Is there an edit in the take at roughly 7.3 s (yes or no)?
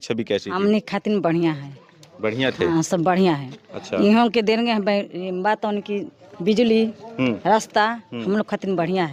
no